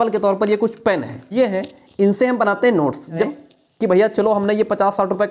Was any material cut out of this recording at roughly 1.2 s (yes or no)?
yes